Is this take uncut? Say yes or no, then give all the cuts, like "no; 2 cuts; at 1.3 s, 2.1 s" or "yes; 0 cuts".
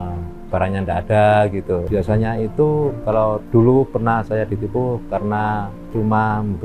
no; 1 cut; at 1.9 s